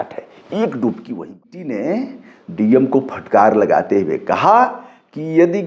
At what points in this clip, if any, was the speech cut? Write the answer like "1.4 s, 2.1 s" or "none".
1.4 s